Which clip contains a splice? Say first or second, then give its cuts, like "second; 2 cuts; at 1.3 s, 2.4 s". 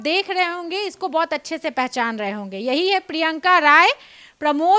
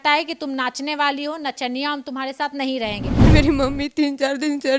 second; 1 cut; at 3.3 s